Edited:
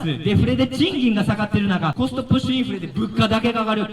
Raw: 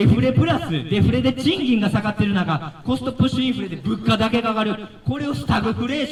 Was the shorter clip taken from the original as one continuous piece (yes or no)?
no